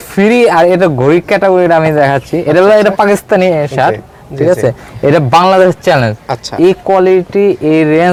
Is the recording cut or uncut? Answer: uncut